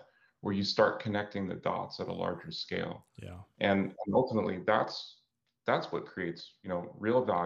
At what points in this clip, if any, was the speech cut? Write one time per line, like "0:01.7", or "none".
0:06.5